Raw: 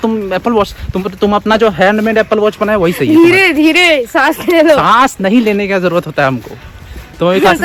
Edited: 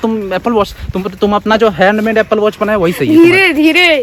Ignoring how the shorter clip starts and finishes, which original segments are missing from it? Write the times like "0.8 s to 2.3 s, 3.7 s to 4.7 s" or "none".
none